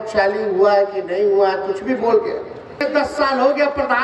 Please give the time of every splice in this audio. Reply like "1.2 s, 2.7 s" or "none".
2.8 s